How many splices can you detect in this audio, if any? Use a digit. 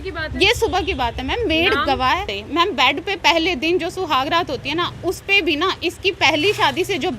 1